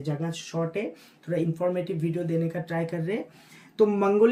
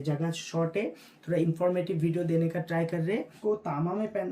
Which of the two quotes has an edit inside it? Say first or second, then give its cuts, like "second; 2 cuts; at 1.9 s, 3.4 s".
second; 1 cut; at 3.4 s